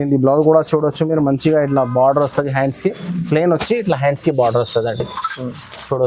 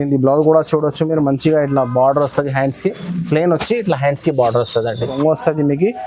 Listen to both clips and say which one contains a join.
second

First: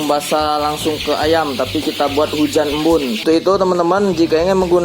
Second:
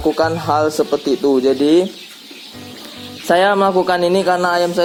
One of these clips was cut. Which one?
first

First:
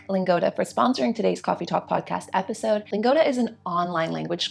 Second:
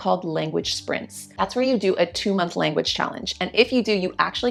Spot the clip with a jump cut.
first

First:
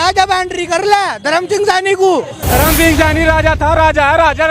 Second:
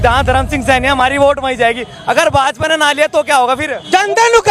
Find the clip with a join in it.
first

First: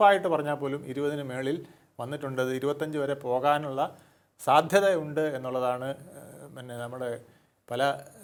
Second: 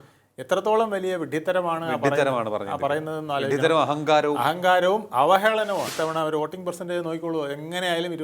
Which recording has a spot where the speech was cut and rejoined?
second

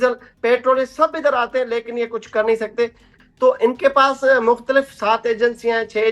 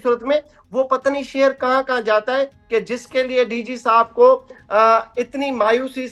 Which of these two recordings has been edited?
first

